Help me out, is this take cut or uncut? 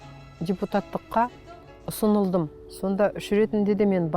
cut